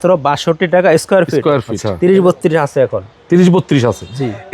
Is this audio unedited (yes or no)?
no